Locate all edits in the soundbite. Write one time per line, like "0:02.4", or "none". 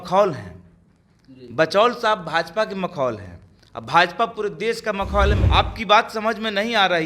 0:05.4